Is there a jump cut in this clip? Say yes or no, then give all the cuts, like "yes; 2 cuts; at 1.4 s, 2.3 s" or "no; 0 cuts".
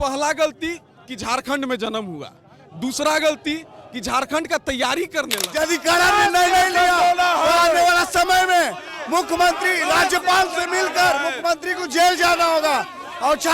yes; 1 cut; at 5.4 s